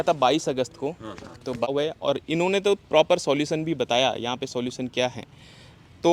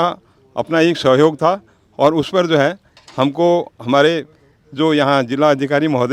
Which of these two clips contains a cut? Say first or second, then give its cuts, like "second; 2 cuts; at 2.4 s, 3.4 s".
first; 1 cut; at 1.7 s